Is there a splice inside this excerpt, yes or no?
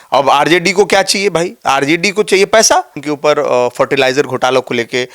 yes